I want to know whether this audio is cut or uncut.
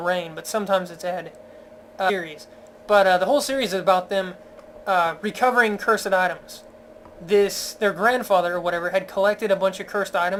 uncut